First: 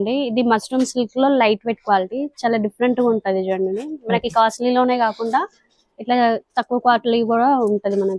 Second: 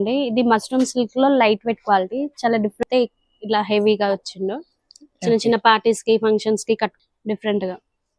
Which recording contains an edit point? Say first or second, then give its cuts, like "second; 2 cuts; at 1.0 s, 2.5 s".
second; 2 cuts; at 2.8 s, 7.0 s